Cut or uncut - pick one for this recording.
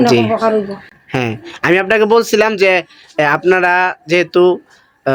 uncut